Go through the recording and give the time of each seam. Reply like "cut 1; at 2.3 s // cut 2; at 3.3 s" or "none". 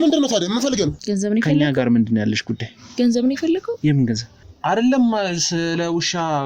cut 1; at 1.0 s // cut 2; at 4.4 s